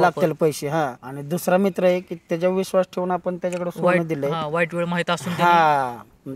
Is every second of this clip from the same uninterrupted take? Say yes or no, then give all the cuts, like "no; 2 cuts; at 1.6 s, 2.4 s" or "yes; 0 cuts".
yes; 0 cuts